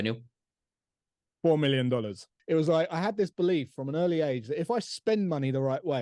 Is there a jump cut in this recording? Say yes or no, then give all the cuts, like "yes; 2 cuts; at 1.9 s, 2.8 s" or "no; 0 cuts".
yes; 1 cut; at 2.3 s